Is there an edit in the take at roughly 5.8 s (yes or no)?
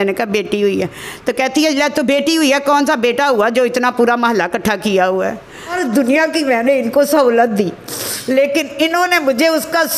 yes